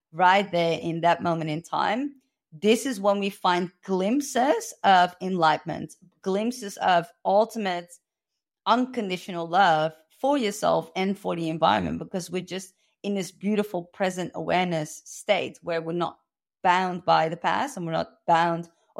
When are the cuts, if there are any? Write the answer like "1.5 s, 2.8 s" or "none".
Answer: none